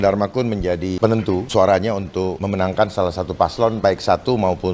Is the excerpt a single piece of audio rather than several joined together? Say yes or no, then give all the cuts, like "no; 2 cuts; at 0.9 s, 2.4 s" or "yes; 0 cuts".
no; 3 cuts; at 1.0 s, 2.4 s, 3.8 s